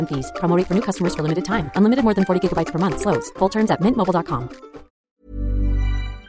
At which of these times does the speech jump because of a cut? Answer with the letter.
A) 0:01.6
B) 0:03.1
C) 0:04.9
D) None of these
C